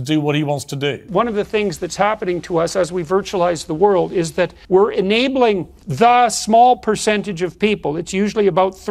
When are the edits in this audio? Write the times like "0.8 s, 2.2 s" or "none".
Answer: 1.0 s, 4.6 s, 5.8 s

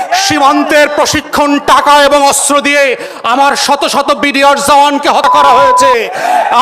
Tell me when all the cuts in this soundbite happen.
5.3 s

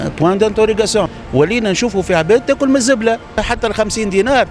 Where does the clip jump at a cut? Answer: 1.1 s, 3.4 s

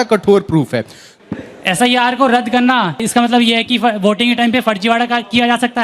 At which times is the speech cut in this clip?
1.1 s, 3.0 s

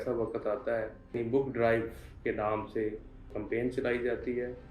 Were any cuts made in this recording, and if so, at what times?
1.1 s

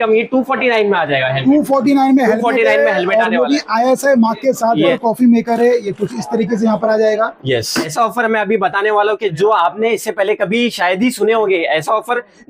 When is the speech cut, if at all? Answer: 4.9 s, 7.8 s

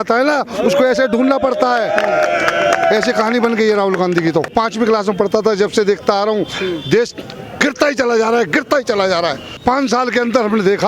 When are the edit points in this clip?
4.5 s, 9.6 s

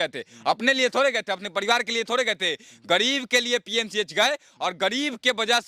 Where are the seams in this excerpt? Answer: none

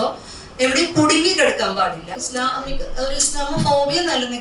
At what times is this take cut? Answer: 2.2 s

